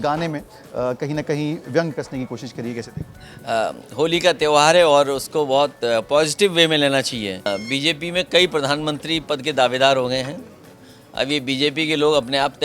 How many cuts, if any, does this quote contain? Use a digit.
1